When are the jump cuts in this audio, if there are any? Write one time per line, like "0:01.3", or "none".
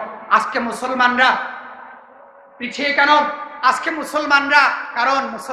none